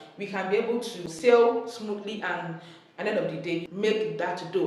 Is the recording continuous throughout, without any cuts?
no; 2 cuts; at 1.1 s, 3.7 s

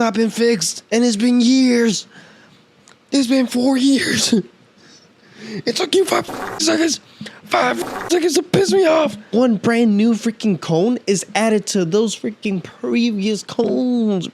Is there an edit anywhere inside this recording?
yes; 1 cut; at 9.3 s

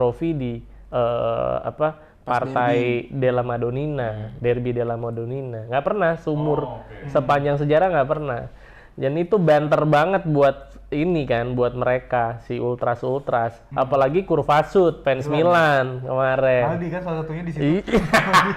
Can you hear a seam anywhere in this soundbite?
yes; 1 cut; at 15.0 s

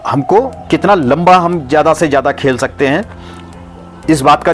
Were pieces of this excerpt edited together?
no; 0 cuts

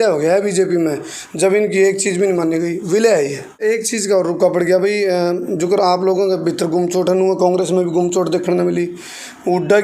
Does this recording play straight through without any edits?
no; 1 cut; at 3.6 s

